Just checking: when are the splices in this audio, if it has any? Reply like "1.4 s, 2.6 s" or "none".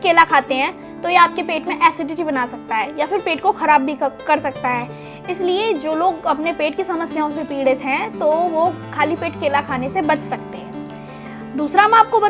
none